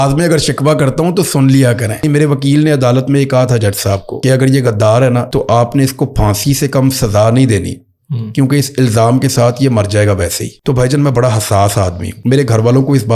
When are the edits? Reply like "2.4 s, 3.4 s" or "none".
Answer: 2.0 s, 4.1 s, 5.3 s, 10.5 s, 12.1 s